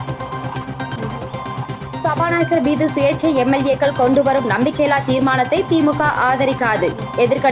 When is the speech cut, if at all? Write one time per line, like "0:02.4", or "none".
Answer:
0:01.6